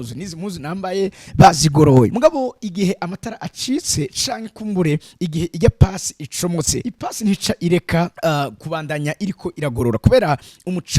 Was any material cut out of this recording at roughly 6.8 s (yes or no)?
yes